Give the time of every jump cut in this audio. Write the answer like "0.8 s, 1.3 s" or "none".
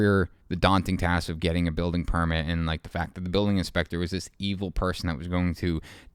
none